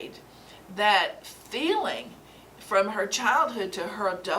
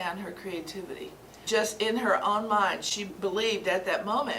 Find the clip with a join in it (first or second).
second